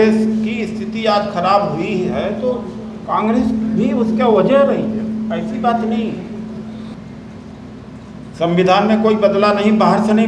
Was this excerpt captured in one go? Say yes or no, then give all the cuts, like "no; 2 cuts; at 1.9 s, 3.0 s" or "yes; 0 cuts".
no; 1 cut; at 6.9 s